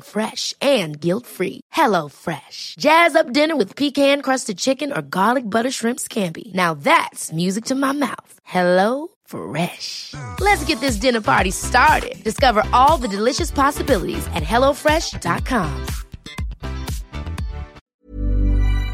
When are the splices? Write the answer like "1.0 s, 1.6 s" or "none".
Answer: 17.8 s